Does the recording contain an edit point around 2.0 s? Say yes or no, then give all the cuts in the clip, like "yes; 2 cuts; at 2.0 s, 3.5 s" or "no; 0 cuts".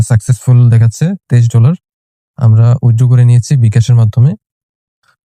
no; 0 cuts